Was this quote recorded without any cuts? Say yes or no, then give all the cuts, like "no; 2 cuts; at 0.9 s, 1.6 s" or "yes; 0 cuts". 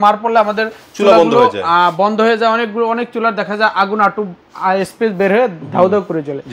yes; 0 cuts